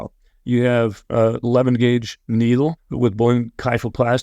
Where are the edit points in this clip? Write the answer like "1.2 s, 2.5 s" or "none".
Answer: 2.2 s, 2.8 s